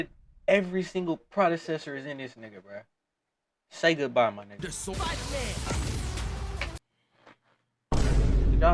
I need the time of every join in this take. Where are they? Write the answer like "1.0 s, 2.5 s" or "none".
4.9 s

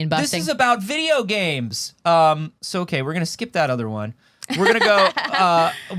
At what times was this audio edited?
2.5 s

